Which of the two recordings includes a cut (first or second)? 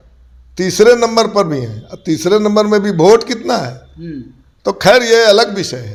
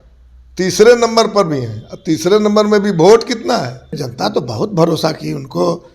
second